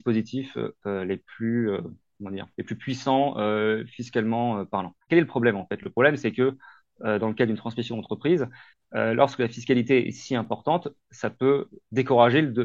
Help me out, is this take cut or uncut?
cut